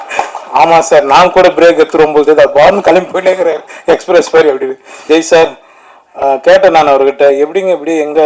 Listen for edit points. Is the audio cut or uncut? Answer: cut